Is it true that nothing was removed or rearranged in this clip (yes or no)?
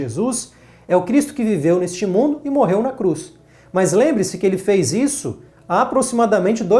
yes